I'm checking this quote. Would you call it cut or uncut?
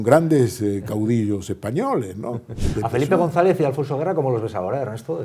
cut